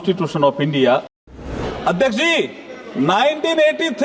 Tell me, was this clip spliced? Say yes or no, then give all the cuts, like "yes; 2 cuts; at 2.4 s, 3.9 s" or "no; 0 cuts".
yes; 1 cut; at 1.3 s